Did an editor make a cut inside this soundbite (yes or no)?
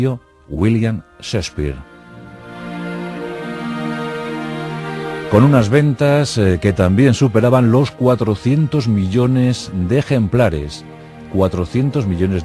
yes